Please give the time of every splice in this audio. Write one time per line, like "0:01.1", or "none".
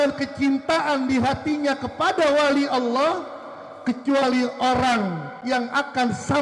0:05.3